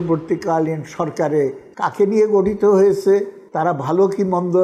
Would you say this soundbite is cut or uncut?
cut